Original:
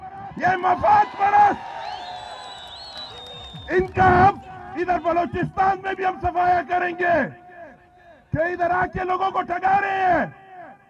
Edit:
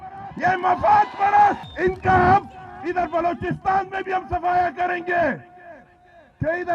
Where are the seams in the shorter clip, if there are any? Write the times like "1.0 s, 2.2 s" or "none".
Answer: 1.7 s

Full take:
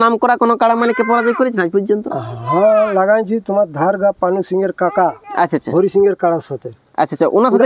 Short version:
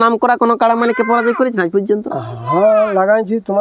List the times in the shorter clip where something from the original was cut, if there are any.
none

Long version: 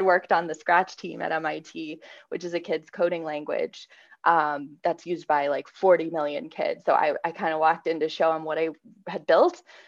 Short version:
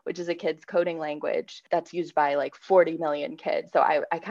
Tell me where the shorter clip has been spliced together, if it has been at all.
1.6 s

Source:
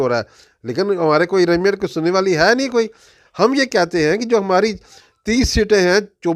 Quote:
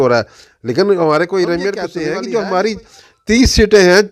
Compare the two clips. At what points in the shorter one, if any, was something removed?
1.9 s

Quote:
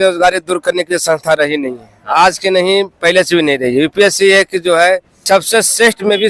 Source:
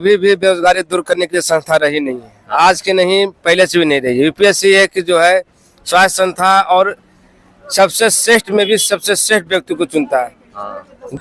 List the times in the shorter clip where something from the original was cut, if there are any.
5.1 s

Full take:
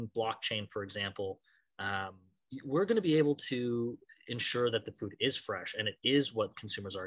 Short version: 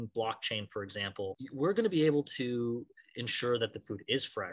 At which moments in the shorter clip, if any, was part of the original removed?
1.4 s

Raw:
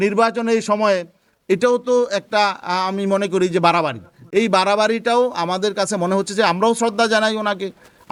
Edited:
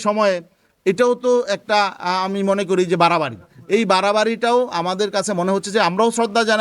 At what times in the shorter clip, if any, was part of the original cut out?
none

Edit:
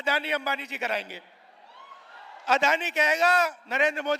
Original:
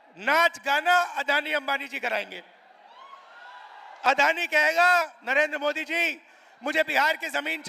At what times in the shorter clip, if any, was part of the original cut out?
2.5 s

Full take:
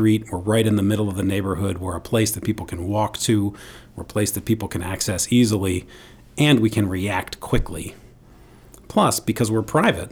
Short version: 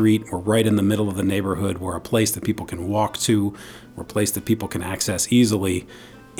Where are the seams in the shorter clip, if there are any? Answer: none

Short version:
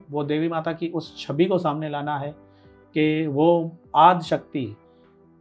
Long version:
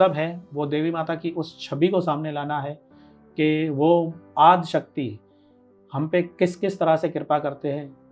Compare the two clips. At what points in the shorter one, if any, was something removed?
none

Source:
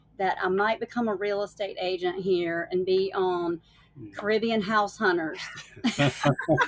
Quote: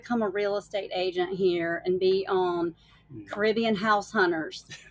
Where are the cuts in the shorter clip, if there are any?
none

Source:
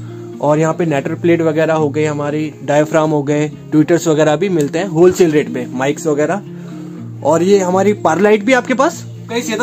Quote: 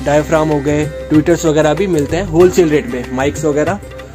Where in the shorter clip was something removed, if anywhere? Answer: none

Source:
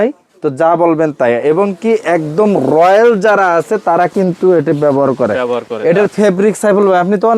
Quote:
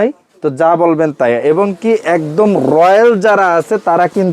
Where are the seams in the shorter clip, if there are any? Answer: none

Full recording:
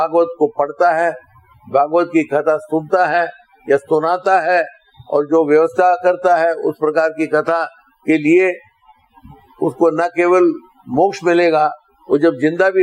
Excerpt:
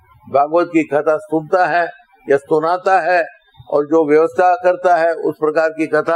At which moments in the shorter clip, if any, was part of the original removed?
none

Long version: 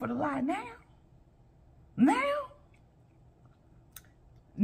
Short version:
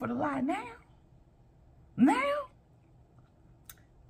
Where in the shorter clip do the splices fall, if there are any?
2.5 s

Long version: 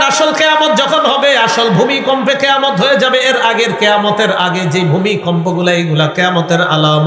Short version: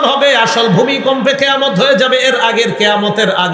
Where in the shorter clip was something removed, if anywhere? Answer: none

